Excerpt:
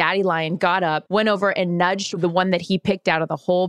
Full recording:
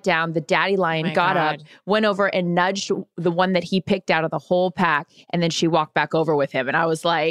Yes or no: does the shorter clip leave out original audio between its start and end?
yes